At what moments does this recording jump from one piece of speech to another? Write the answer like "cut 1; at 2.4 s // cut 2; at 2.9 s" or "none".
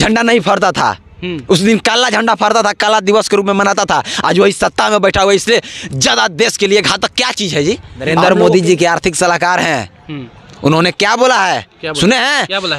cut 1; at 8.1 s